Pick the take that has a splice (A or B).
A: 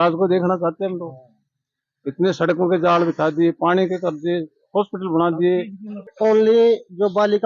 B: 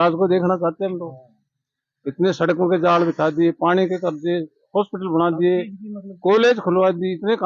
A